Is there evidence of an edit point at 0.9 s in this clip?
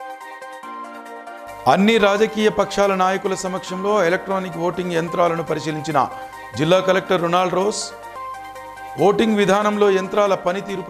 yes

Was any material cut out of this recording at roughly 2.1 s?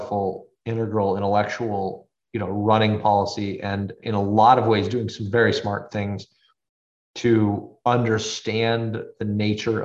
yes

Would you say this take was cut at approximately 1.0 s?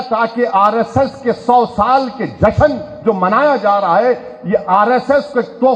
no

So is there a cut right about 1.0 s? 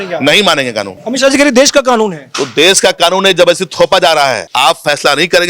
yes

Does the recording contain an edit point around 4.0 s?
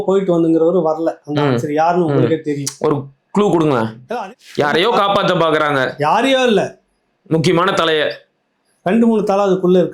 yes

